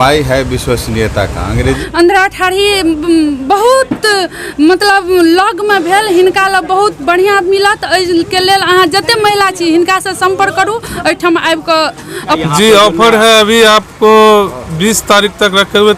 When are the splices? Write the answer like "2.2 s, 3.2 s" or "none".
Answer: 1.8 s, 12.4 s